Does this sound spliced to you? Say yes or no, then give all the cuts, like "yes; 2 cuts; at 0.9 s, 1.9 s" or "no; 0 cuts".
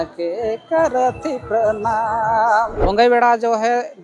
yes; 1 cut; at 2.8 s